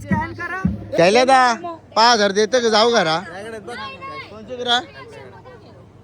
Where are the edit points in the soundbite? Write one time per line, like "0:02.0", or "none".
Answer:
0:01.0